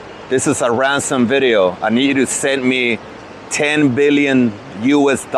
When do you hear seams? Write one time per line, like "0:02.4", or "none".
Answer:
none